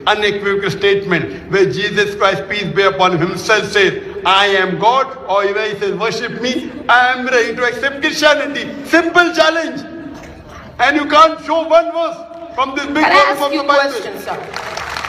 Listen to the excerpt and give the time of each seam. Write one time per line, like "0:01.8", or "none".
0:02.6

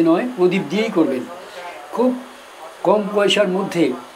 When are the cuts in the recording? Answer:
0:01.9

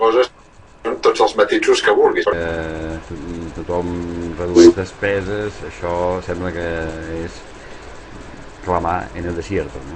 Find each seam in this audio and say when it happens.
none

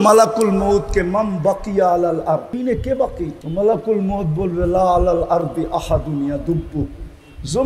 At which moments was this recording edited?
0:02.5
0:03.4

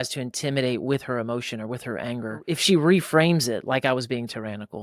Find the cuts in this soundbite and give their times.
0:02.5

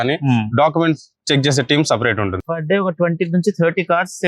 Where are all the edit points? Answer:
0:02.4

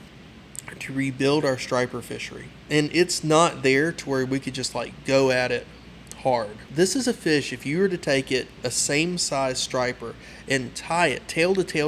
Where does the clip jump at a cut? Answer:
0:06.6

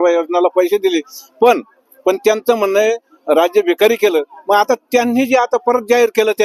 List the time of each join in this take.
none

